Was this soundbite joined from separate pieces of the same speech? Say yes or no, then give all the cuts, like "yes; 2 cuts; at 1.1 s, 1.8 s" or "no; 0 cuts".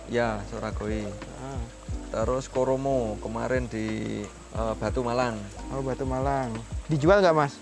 yes; 2 cuts; at 4.4 s, 6.7 s